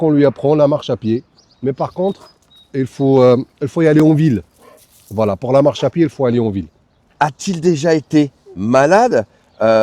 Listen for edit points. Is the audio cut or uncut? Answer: uncut